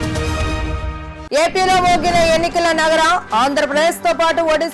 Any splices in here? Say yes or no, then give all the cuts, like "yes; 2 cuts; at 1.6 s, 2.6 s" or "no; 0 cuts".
yes; 1 cut; at 1.1 s